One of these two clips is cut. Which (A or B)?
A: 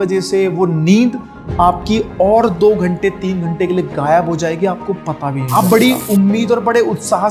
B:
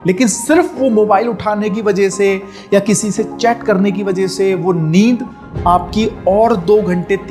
A